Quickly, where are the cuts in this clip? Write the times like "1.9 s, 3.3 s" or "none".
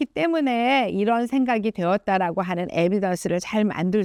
none